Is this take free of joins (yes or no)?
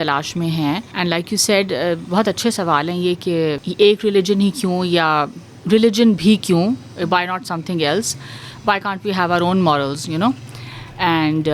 no